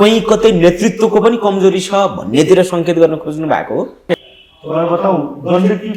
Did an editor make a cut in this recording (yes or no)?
yes